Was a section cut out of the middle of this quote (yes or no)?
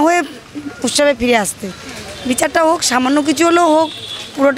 no